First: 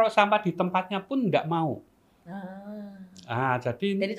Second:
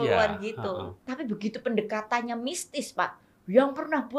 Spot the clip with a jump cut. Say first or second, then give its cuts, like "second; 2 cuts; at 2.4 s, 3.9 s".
second; 1 cut; at 1.0 s